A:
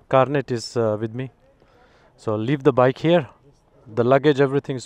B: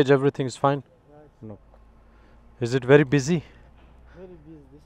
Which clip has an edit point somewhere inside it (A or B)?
B